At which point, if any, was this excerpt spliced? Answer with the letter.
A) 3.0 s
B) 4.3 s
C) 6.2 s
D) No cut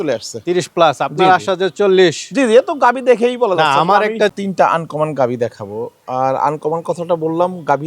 B